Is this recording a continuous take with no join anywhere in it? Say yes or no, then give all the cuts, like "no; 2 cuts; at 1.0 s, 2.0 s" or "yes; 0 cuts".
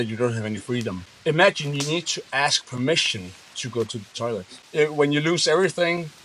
no; 2 cuts; at 1.1 s, 4.6 s